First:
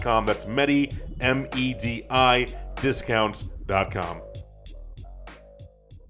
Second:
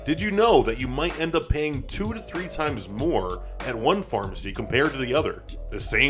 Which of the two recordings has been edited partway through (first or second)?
first